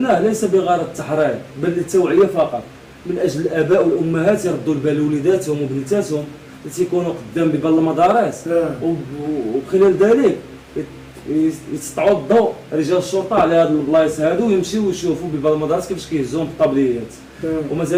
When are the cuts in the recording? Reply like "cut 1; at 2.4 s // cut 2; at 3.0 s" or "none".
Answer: none